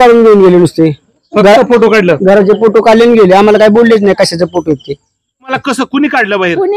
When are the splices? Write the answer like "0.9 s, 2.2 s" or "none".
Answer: 5.6 s